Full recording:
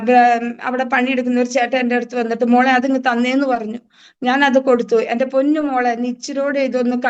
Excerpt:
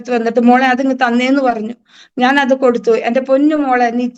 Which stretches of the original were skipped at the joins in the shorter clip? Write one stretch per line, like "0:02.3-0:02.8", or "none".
none